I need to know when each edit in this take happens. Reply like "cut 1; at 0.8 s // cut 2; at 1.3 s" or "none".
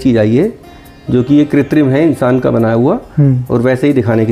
none